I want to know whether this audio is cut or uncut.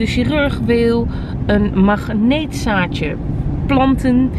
uncut